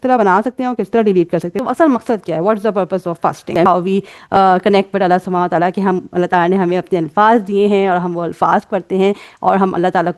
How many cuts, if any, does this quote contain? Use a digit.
2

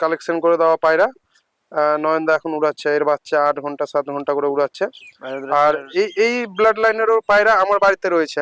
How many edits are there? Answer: 0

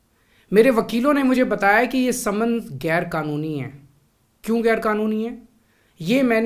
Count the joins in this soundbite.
0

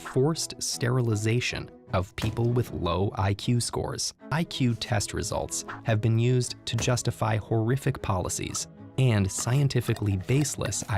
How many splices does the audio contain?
1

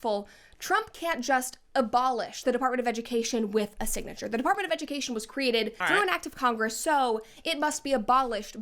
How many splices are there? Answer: 2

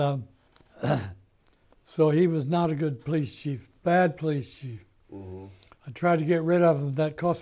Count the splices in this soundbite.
0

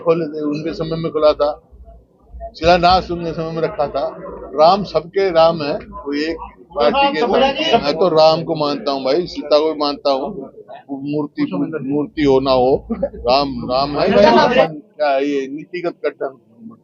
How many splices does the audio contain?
2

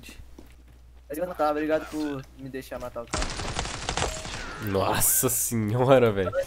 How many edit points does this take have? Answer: 1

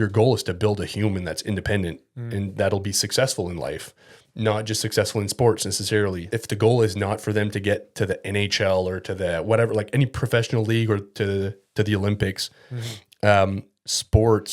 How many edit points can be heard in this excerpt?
1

